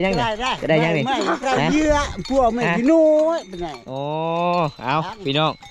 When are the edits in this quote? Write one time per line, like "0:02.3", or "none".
none

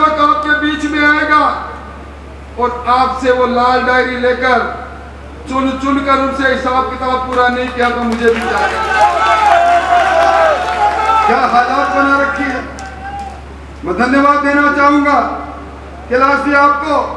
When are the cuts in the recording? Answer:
none

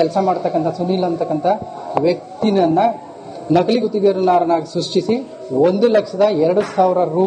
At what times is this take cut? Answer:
none

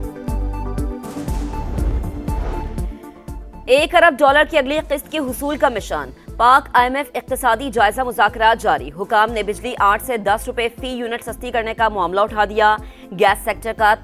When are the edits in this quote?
none

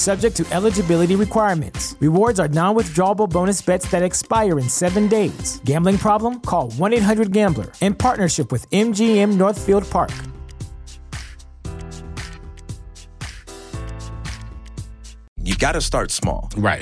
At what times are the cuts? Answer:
0:15.3

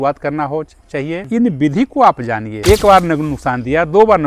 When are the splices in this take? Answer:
0:01.2
0:02.5

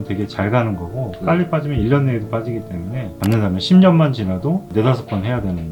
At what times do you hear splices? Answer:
0:03.1

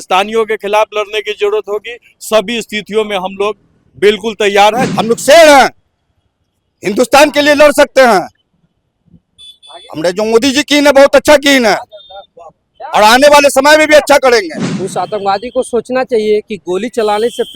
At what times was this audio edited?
0:04.9
0:14.6

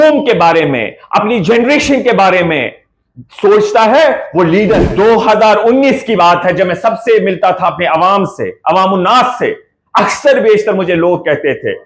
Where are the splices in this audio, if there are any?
0:04.8

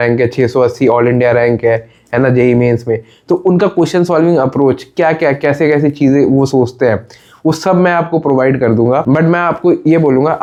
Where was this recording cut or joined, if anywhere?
none

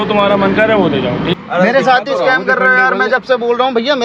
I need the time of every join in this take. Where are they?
0:01.4

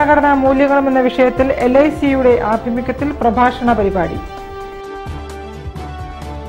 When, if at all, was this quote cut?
none

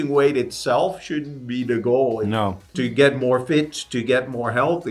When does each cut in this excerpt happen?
0:02.7

